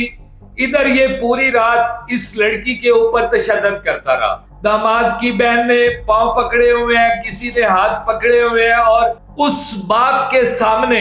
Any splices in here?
yes; 1 cut; at 4.5 s

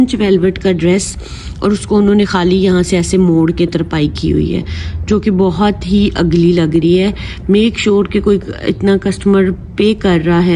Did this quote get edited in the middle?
no; 0 cuts

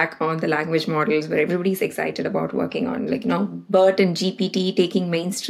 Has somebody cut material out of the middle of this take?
no; 0 cuts

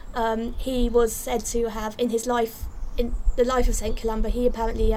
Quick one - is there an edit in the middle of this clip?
no; 0 cuts

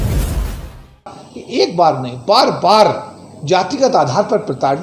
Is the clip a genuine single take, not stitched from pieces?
no; 1 cut; at 1.2 s

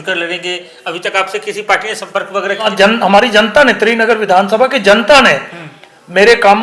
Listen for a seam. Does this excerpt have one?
yes; 1 cut; at 2.7 s

